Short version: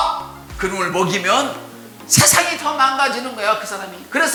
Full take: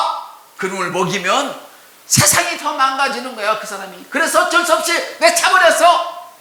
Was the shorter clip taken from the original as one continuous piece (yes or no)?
yes